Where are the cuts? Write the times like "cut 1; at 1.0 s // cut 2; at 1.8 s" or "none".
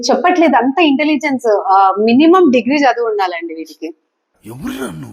none